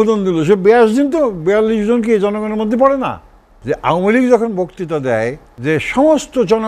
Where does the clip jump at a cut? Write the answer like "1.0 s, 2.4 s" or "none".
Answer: 3.5 s, 5.5 s